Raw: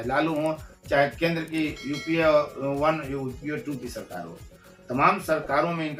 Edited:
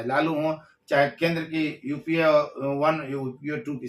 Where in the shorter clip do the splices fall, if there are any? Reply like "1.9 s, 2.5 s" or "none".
none